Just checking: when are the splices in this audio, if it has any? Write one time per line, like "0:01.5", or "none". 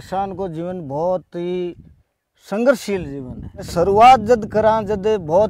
0:03.7